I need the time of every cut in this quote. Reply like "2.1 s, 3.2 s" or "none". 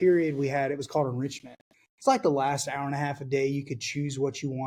none